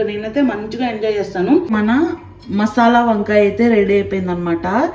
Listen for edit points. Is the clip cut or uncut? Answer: cut